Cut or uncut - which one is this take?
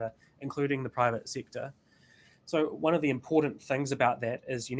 uncut